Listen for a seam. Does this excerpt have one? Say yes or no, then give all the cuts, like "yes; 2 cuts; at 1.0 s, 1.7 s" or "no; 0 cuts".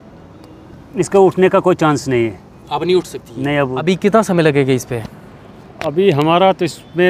yes; 1 cut; at 3.8 s